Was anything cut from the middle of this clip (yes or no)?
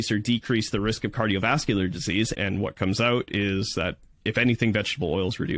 yes